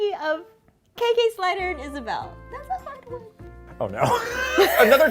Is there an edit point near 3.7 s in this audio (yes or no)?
no